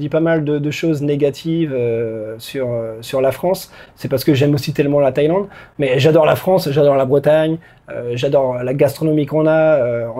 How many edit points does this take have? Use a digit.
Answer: 0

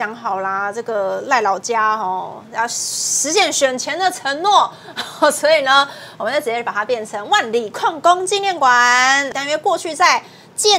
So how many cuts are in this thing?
1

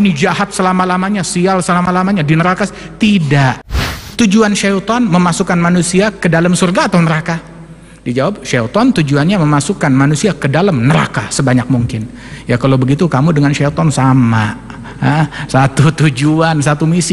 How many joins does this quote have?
1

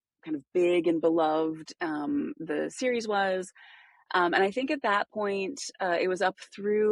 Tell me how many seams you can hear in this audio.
0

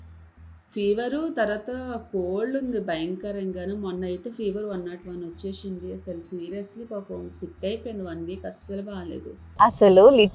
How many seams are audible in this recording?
1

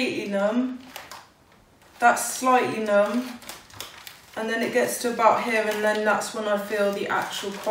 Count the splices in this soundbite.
0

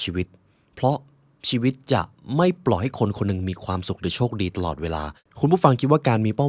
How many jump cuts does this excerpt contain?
1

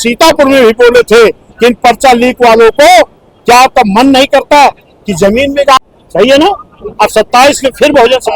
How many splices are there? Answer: 1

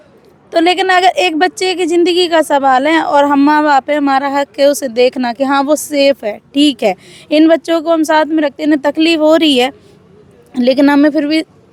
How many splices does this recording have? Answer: 0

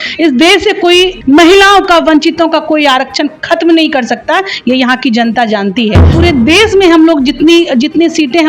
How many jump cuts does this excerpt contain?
2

